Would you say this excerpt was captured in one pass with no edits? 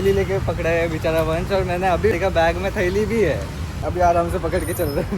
no; 2 cuts; at 2.2 s, 3.9 s

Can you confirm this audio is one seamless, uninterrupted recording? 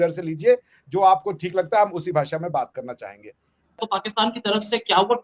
no; 1 cut; at 3.8 s

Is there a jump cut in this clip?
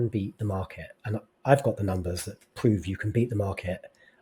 no; 0 cuts

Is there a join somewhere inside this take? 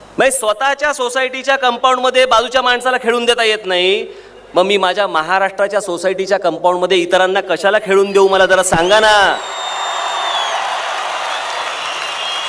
no; 0 cuts

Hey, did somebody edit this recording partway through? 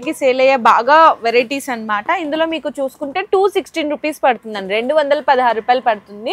no; 0 cuts

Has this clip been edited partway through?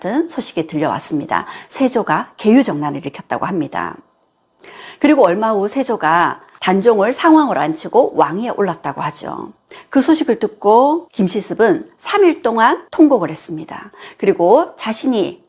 yes; 1 cut; at 11.1 s

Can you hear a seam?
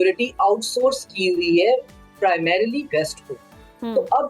no; 0 cuts

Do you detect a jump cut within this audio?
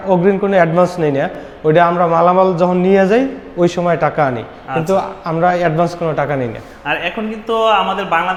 no; 0 cuts

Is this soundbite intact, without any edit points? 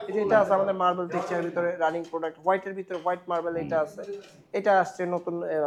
yes; 0 cuts

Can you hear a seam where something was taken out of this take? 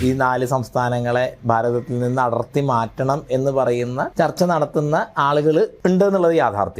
yes; 2 cuts; at 4.1 s, 5.7 s

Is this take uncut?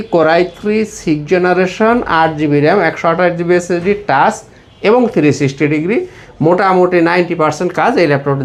yes; 0 cuts

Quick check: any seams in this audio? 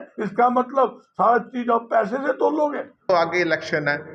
yes; 1 cut; at 3.1 s

